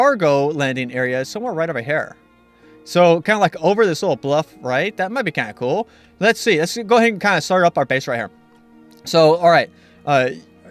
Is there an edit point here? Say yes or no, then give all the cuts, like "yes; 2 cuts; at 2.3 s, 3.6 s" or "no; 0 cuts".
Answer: no; 0 cuts